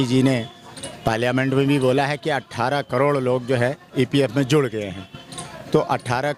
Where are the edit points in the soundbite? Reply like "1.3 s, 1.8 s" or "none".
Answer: none